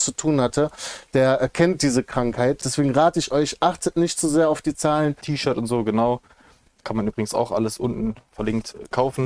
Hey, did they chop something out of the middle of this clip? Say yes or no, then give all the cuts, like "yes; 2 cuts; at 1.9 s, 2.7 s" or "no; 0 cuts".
yes; 2 cuts; at 2.7 s, 5.3 s